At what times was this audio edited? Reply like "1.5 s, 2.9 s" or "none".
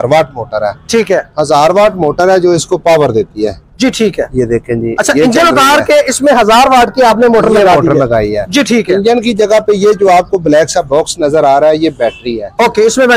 none